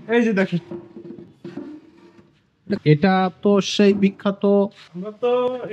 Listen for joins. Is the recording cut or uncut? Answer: cut